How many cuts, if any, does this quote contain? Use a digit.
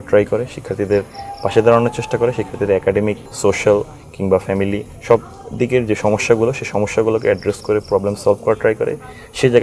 1